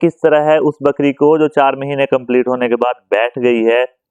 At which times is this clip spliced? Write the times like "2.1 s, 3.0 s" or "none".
none